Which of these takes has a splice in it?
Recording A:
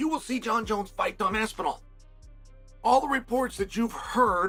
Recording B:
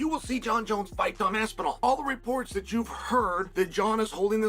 B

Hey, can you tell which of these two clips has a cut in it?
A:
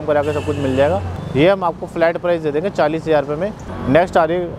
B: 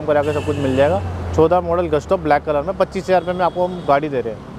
A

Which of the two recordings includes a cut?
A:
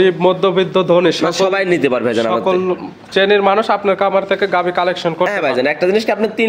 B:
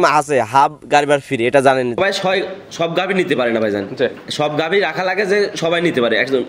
B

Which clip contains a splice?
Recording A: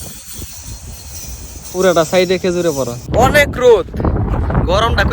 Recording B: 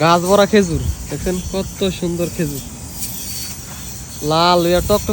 A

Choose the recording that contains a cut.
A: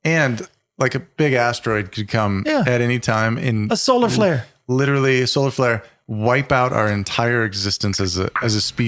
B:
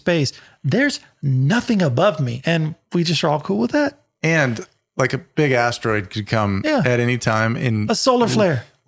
B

